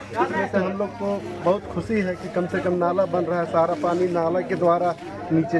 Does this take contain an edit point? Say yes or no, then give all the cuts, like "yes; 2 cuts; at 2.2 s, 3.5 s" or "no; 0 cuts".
no; 0 cuts